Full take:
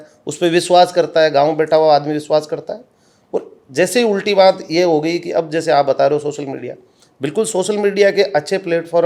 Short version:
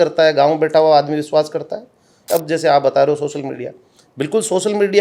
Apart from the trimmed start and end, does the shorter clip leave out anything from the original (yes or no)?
yes